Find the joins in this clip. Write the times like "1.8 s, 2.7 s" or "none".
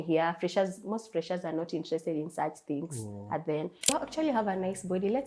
3.9 s